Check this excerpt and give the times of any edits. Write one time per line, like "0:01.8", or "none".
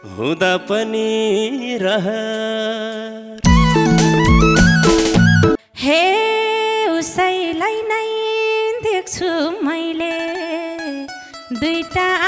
0:05.6